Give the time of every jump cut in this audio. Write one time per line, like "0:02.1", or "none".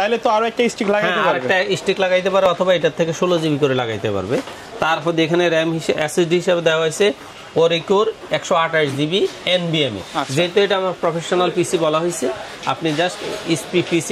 none